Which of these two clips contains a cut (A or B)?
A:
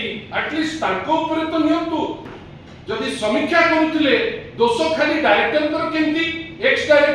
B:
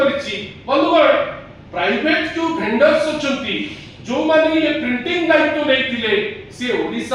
A